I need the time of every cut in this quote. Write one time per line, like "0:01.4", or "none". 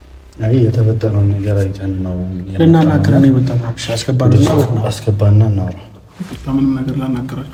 none